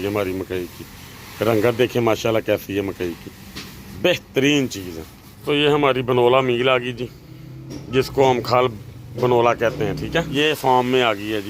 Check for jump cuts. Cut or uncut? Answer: cut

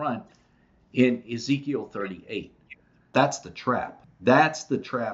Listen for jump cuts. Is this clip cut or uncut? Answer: cut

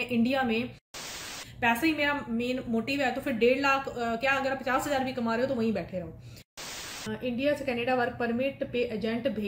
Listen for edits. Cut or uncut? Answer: cut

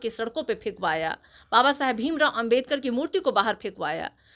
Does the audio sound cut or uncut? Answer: uncut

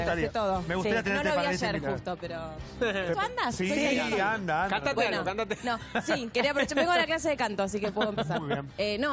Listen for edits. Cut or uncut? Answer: cut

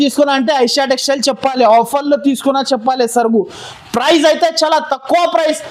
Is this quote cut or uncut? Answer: uncut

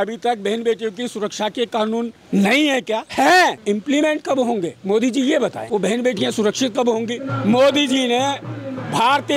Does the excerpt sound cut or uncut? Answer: cut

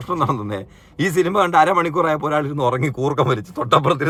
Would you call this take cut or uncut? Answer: uncut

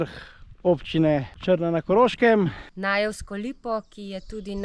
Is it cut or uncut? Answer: cut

